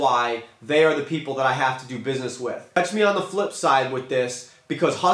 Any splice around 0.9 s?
no; 1 cut; at 2.6 s

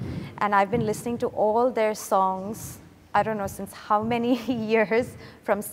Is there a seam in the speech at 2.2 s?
no; 0 cuts

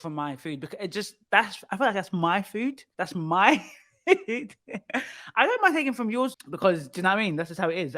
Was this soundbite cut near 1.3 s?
no; 2 cuts; at 2.9 s, 6.4 s

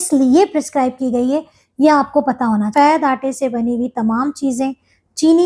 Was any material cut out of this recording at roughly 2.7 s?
yes; 1 cut; at 2.7 s

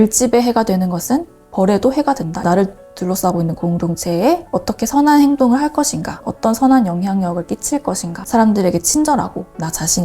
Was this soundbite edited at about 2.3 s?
yes; 2 cuts; at 2.3 s, 8.2 s

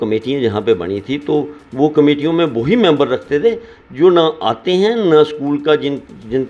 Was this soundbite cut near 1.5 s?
no; 0 cuts

